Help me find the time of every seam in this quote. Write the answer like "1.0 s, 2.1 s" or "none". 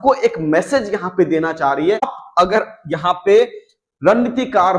2.2 s